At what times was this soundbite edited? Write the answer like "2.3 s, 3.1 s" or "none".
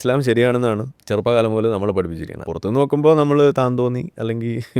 0.9 s, 2.5 s